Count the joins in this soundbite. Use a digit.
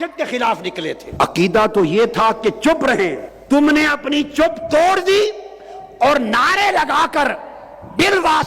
2